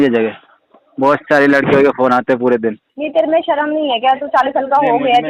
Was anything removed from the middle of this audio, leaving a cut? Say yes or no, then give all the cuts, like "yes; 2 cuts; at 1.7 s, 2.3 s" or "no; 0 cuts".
yes; 1 cut; at 2.9 s